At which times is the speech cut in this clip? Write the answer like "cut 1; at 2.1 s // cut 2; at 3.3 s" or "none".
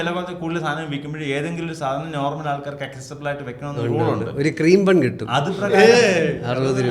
none